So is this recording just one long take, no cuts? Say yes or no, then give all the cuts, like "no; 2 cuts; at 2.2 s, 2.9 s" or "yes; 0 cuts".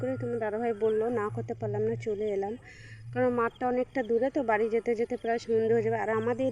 yes; 0 cuts